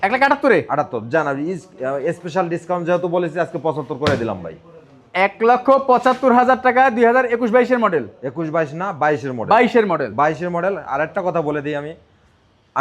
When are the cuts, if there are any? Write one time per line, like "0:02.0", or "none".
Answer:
none